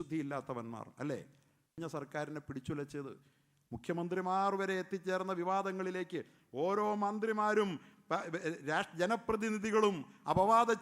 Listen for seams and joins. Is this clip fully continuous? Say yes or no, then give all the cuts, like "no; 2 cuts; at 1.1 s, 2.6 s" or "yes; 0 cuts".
no; 1 cut; at 1.8 s